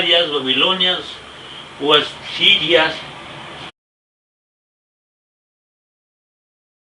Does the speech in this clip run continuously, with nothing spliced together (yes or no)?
yes